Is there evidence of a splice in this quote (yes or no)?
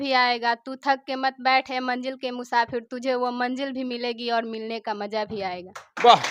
no